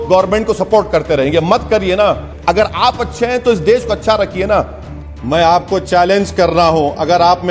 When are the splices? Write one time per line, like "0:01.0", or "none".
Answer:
0:02.3
0:05.1